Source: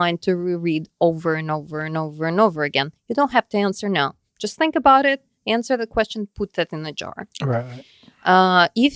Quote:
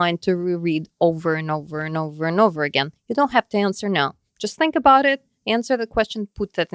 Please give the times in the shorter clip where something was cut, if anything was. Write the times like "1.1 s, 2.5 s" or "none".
none